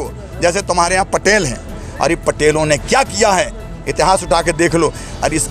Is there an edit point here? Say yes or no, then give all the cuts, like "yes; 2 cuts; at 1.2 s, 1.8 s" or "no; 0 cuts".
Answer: no; 0 cuts